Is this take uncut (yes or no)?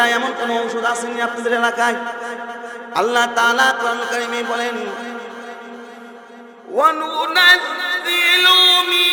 yes